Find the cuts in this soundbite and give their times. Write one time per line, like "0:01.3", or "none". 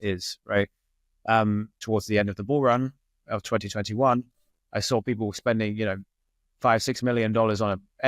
0:01.8